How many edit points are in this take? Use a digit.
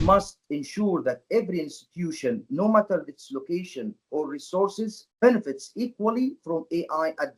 0